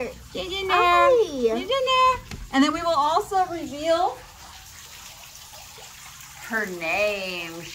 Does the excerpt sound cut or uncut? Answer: uncut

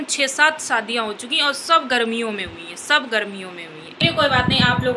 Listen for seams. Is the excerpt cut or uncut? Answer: cut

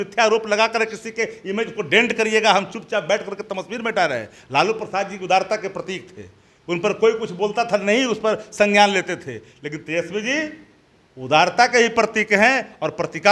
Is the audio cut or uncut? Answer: uncut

